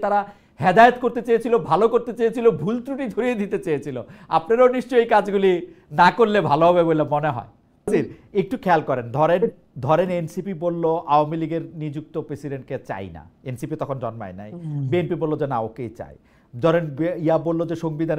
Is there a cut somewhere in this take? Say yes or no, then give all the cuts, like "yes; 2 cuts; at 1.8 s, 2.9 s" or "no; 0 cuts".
yes; 1 cut; at 7.9 s